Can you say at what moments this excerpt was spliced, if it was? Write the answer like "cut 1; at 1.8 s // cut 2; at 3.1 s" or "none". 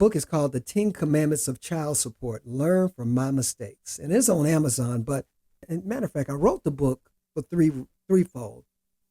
cut 1; at 5.7 s